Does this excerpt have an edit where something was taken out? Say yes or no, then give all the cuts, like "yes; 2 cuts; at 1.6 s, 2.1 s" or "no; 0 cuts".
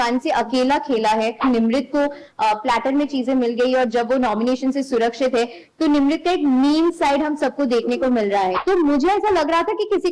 yes; 2 cuts; at 1.4 s, 8.6 s